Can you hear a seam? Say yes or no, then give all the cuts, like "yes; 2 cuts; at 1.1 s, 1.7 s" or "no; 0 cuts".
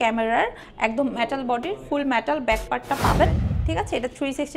yes; 1 cut; at 3.5 s